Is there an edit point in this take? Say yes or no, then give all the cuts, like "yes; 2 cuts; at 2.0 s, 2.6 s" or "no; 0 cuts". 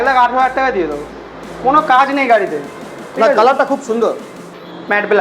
no; 0 cuts